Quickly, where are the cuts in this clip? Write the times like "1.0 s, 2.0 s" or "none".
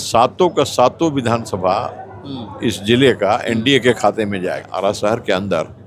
4.7 s